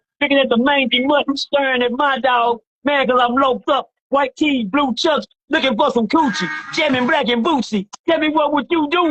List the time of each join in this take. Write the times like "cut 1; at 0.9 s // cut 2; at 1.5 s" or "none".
none